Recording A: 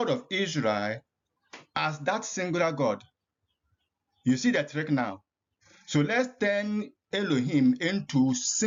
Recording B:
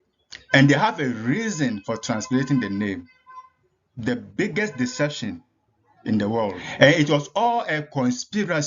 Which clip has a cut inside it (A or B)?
B